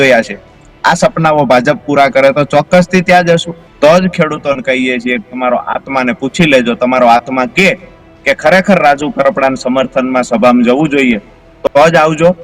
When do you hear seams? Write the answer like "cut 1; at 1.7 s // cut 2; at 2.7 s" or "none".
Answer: cut 1; at 3.6 s